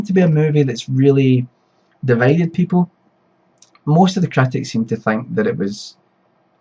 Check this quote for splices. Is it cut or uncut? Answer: uncut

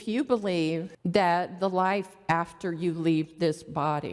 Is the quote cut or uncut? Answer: cut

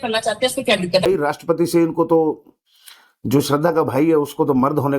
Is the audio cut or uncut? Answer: cut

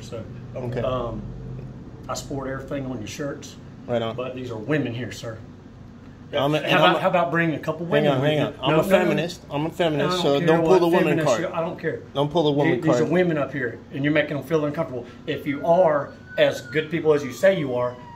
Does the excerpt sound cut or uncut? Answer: uncut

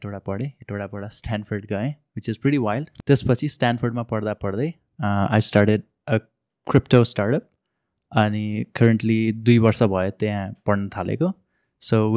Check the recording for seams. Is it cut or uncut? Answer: cut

